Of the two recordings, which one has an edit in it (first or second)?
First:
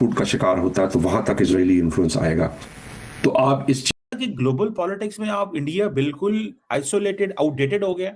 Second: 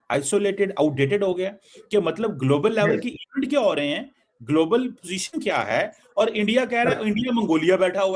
first